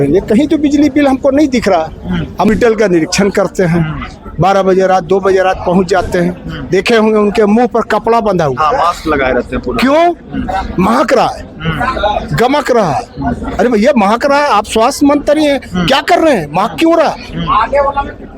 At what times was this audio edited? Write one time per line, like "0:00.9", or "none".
0:02.5